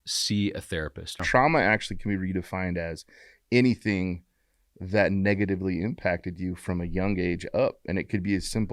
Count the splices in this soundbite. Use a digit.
1